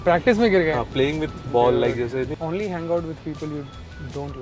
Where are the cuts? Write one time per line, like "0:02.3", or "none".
0:02.3

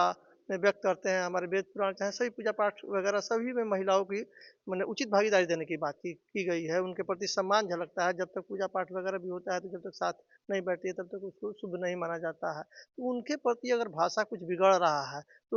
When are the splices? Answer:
none

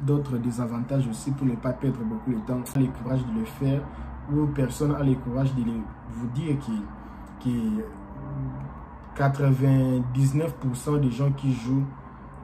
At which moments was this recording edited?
0:02.7

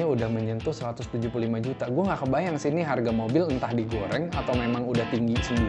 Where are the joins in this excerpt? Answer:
none

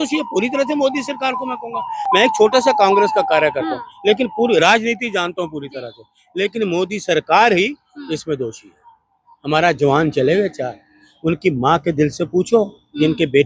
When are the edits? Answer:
none

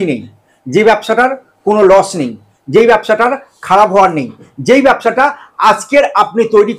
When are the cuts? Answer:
none

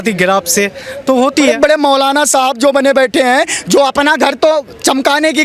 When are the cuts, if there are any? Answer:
0:01.5

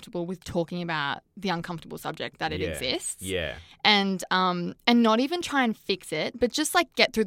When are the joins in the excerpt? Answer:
0:01.3

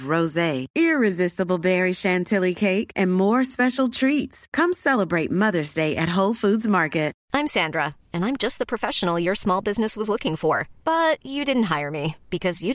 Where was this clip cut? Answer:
0:07.2

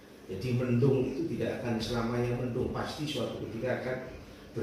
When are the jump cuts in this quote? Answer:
none

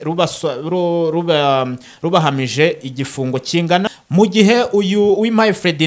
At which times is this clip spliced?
0:03.9

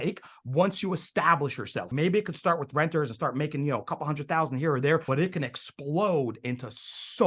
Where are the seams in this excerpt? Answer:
0:01.9
0:05.0

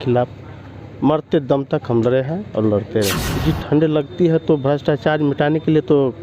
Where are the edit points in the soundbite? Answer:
0:03.3

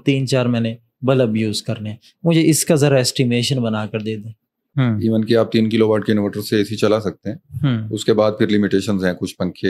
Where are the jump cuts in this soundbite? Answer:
0:04.6

